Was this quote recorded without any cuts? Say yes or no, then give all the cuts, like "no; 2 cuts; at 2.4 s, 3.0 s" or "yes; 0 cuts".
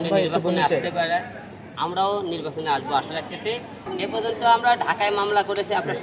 no; 1 cut; at 3.7 s